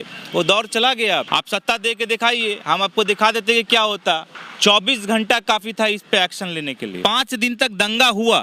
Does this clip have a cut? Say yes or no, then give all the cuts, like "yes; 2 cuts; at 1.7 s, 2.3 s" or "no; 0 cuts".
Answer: yes; 2 cuts; at 1.3 s, 7.0 s